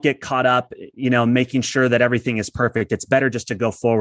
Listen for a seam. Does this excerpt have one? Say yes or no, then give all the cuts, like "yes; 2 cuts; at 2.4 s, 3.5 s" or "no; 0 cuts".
no; 0 cuts